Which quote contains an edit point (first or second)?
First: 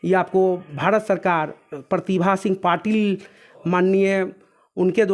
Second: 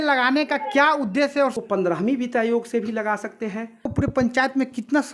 second